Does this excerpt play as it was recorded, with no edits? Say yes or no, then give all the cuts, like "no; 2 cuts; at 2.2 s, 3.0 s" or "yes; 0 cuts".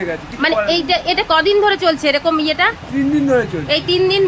yes; 0 cuts